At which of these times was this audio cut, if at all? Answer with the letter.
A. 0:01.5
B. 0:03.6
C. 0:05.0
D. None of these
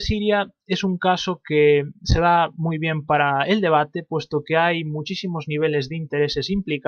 D